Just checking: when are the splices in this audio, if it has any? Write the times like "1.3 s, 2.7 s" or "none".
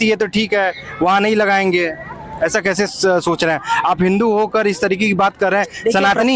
none